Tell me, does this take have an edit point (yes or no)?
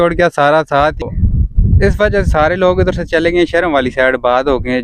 yes